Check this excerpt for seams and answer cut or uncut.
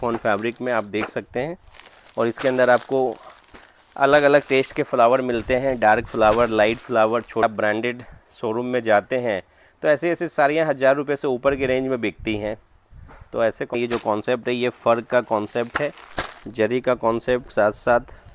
cut